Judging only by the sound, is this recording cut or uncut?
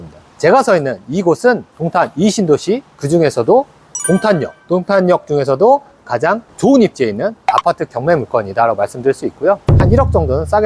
cut